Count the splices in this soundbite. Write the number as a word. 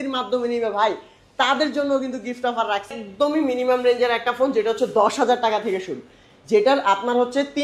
one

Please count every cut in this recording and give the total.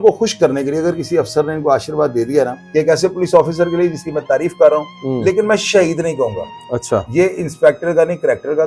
one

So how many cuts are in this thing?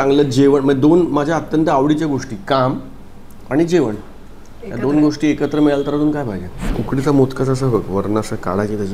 one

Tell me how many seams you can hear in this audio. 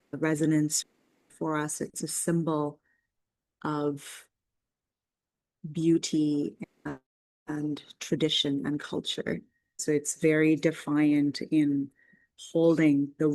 one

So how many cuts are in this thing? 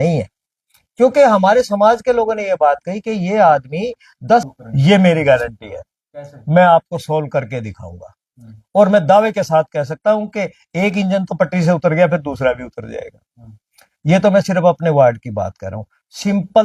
one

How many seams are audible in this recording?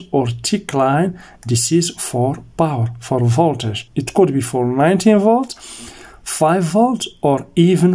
one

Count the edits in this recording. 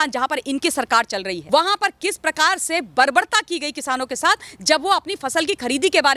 one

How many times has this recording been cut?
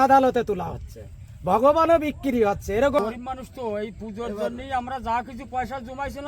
one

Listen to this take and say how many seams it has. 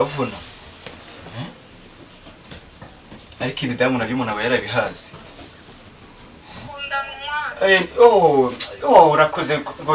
one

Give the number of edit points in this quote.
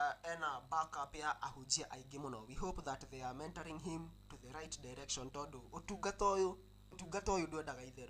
one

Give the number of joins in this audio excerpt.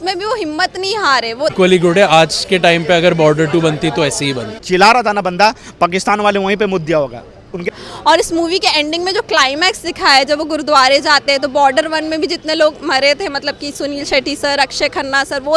three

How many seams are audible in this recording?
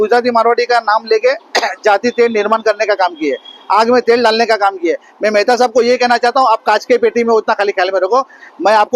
zero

